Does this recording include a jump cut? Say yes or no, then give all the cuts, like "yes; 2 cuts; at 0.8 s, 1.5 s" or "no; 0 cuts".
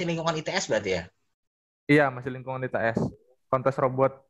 yes; 1 cut; at 3.3 s